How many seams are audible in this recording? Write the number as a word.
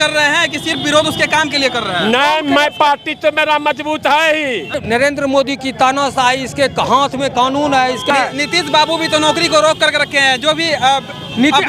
two